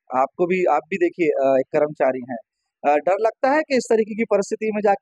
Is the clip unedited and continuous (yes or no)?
yes